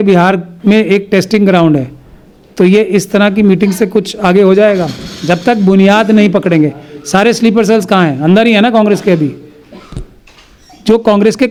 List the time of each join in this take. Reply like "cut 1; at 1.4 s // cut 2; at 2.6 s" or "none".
none